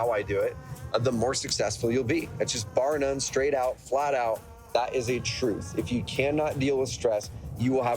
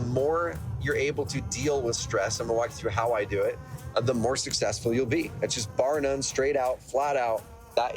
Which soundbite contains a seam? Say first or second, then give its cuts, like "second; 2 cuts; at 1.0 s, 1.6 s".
first; 1 cut; at 6.9 s